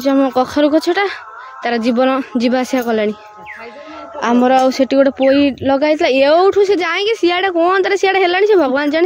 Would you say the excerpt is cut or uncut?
uncut